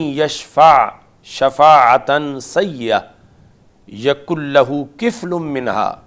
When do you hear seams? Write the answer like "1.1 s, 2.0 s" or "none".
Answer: none